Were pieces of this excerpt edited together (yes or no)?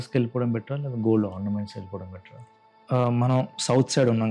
yes